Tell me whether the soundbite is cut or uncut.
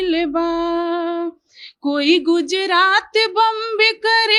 uncut